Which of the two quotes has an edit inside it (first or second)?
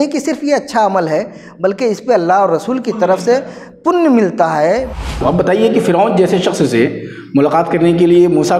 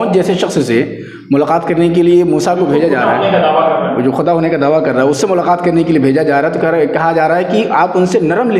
first